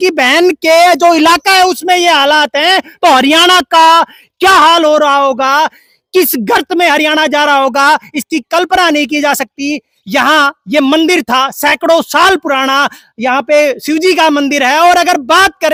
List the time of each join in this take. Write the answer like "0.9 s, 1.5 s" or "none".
none

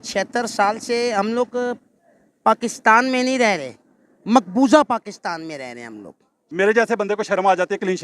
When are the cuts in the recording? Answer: 6.5 s

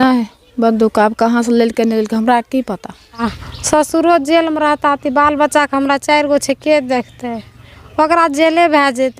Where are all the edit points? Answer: 3.2 s

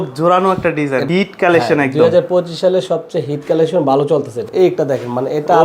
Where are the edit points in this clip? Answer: 1.0 s, 4.5 s

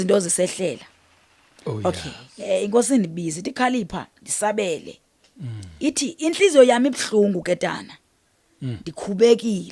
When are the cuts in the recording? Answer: 2.3 s

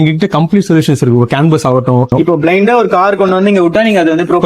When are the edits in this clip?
2.1 s

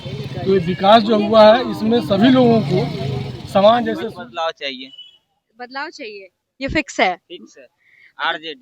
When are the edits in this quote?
4.1 s

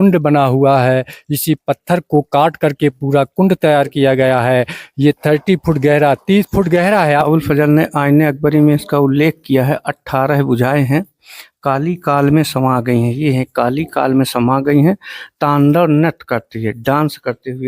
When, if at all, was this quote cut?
7.2 s

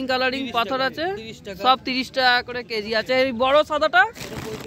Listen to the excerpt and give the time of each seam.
none

